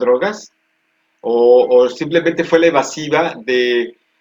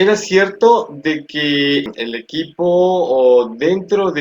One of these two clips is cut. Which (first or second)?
second